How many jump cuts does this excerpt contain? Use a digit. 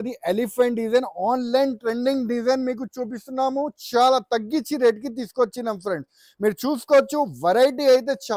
0